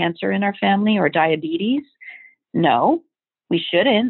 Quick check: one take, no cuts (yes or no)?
yes